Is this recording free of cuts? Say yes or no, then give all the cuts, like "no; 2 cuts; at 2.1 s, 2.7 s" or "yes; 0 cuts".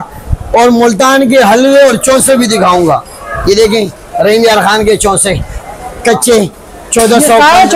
yes; 0 cuts